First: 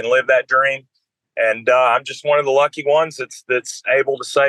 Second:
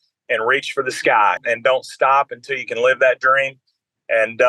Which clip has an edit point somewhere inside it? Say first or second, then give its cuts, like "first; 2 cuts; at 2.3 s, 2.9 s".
second; 1 cut; at 1.4 s